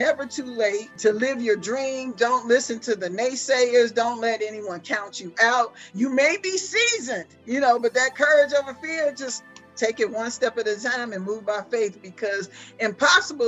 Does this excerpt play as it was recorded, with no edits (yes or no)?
no